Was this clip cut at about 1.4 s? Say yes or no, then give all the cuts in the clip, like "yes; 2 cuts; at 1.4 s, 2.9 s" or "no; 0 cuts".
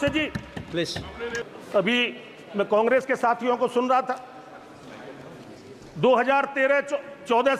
yes; 1 cut; at 1.4 s